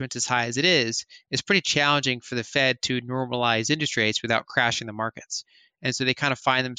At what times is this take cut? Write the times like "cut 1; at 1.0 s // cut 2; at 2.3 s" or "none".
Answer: none